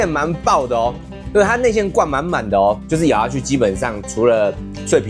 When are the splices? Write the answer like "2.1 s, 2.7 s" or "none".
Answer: none

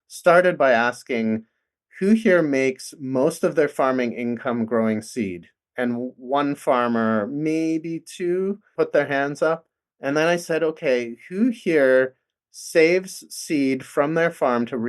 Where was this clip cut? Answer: 8.7 s

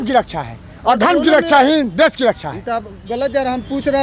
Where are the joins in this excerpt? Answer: none

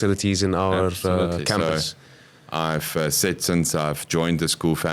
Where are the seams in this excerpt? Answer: none

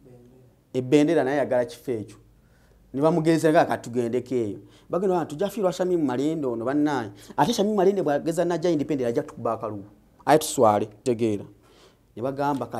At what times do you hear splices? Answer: 11.0 s

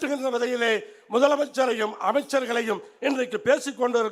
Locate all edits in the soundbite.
none

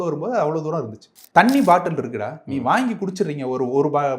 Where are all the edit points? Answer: 1.1 s

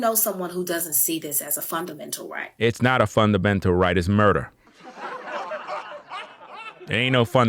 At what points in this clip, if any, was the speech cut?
none

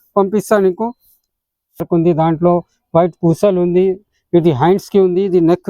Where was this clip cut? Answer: 1.9 s

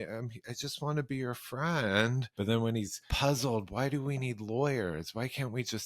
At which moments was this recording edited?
2.2 s, 3.0 s

